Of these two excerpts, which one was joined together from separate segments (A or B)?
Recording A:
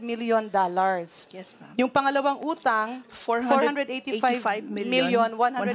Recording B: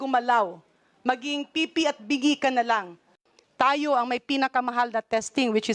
B